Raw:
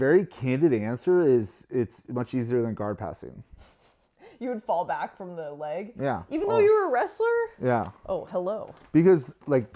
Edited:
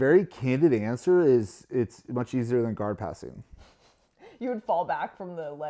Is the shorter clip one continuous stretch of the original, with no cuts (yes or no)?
yes